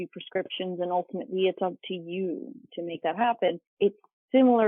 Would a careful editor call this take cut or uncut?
cut